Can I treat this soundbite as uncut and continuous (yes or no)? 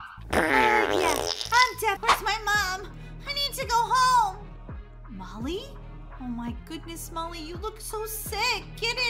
no